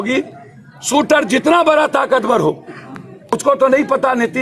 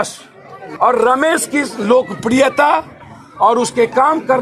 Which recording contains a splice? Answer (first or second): first